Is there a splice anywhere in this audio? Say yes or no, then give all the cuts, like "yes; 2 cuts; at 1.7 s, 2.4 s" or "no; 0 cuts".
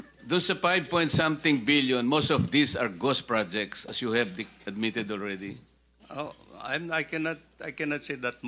no; 0 cuts